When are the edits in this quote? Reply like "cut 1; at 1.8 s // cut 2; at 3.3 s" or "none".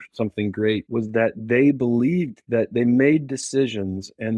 cut 1; at 0.9 s // cut 2; at 2.4 s